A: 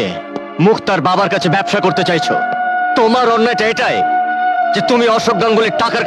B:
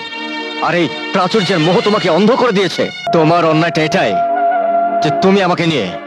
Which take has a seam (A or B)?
B